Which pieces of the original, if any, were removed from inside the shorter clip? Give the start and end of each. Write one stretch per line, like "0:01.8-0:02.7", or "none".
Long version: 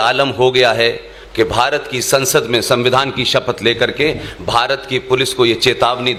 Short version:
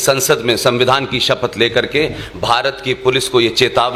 none